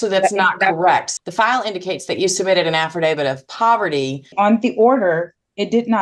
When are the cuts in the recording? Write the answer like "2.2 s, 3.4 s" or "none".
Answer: 1.1 s, 4.3 s